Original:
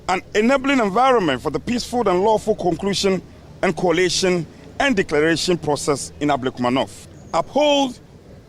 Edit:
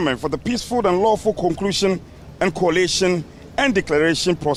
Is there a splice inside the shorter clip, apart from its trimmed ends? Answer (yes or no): no